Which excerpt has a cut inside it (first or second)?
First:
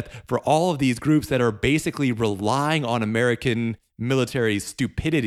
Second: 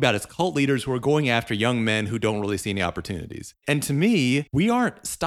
second